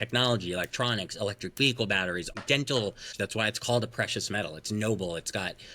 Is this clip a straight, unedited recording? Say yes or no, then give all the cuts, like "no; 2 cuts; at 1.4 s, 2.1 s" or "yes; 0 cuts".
no; 2 cuts; at 2.3 s, 3.1 s